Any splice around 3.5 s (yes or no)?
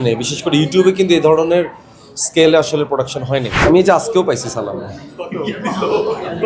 yes